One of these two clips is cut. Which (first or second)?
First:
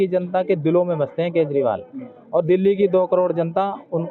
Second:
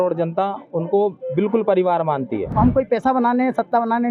second